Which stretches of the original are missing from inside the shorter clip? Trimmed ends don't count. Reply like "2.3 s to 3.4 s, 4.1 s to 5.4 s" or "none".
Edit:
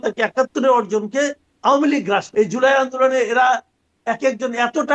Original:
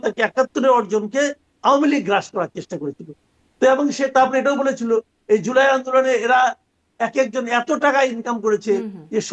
2.3 s to 5.2 s